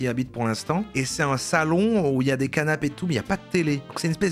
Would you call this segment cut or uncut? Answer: uncut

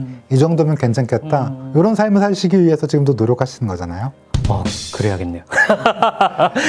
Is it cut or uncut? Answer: uncut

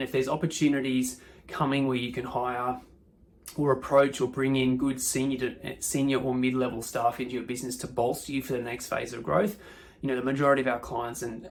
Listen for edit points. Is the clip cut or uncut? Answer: uncut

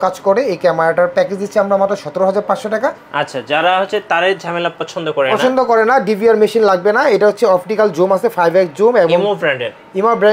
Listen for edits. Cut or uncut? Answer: cut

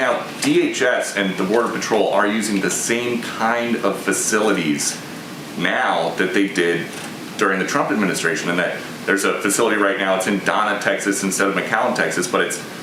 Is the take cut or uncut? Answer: uncut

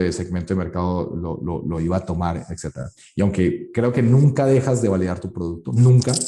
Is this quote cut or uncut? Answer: uncut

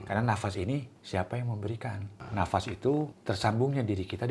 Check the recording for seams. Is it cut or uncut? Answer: cut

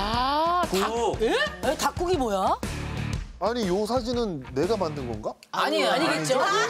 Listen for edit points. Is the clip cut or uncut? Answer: uncut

